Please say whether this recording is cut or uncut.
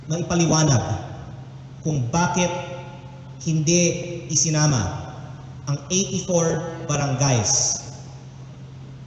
uncut